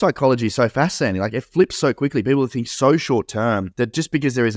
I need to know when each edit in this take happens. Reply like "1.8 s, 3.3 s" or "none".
3.7 s